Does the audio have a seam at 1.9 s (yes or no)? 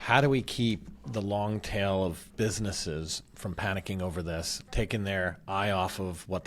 no